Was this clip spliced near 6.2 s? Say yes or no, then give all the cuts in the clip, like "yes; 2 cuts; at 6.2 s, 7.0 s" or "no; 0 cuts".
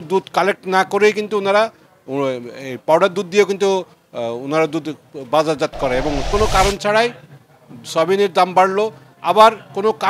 yes; 1 cut; at 6.2 s